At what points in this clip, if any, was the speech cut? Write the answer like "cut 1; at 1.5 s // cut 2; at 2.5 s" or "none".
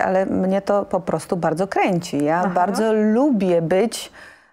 none